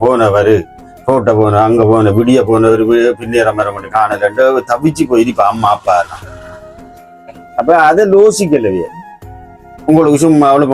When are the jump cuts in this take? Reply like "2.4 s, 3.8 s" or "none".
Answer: none